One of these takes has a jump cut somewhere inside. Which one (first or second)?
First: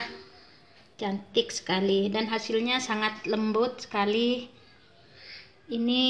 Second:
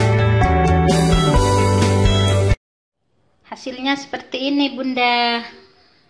second